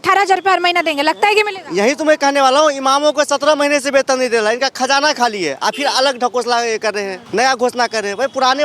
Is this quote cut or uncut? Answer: cut